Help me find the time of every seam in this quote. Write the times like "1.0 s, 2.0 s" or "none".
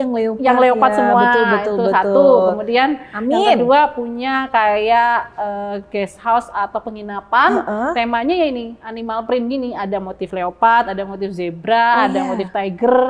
none